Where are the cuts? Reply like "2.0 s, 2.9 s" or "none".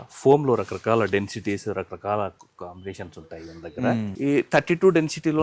4.1 s

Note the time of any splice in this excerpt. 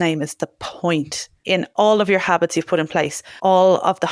1.6 s, 3.2 s

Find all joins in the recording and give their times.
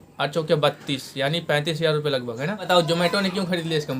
2.7 s

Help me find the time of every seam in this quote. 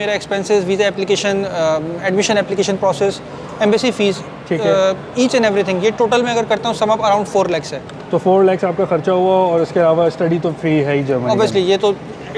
none

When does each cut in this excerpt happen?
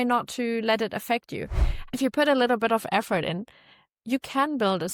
1.8 s

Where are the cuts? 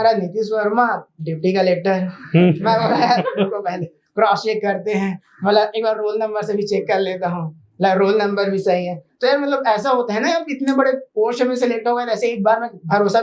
none

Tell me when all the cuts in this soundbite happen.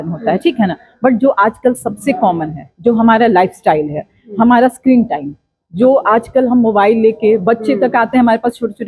none

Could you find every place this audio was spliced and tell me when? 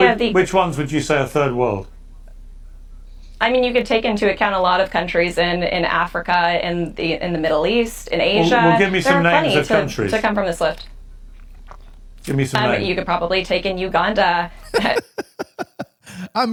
none

